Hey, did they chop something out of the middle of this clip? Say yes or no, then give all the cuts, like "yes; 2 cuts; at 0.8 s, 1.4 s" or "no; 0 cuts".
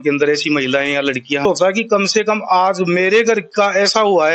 yes; 1 cut; at 1.4 s